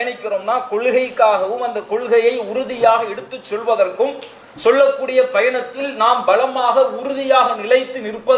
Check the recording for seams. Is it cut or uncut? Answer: uncut